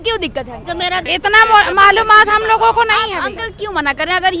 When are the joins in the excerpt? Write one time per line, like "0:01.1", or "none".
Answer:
0:01.0